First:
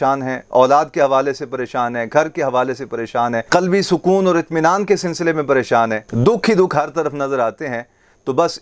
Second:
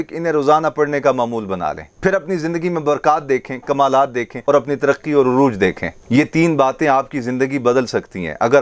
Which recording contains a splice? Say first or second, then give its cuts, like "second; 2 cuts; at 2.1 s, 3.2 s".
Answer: second; 2 cuts; at 4.3 s, 5.9 s